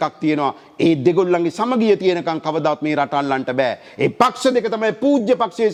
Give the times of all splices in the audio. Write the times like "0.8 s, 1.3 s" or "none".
none